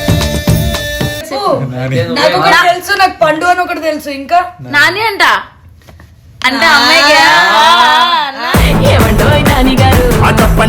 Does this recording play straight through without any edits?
no; 1 cut; at 1.3 s

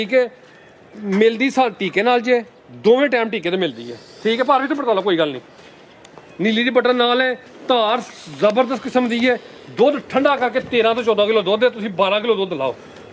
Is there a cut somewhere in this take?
no; 0 cuts

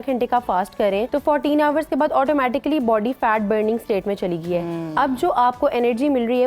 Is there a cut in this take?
yes; 1 cut; at 1.1 s

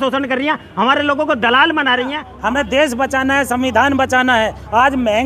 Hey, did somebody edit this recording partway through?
yes; 1 cut; at 2.3 s

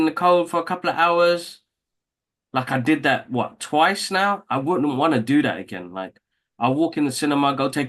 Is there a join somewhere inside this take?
no; 0 cuts

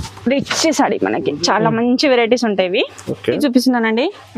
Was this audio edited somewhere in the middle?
yes; 1 cut; at 3.4 s

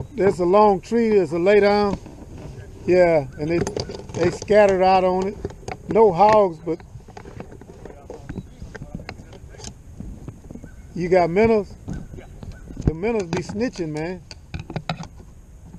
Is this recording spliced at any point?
no; 0 cuts

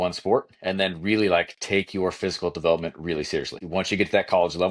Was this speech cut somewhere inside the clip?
yes; 1 cut; at 3.6 s

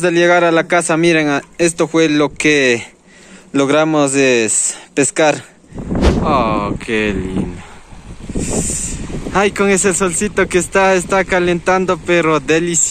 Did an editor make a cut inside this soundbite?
yes; 1 cut; at 5.8 s

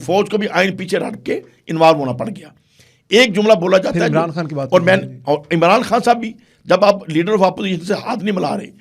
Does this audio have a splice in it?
no; 0 cuts

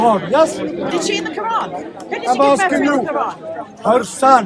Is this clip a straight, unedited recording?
yes; 0 cuts

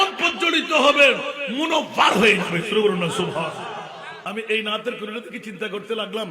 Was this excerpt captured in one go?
no; 1 cut; at 4.1 s

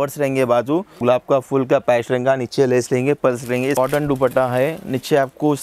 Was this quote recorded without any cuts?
no; 2 cuts; at 0.9 s, 3.7 s

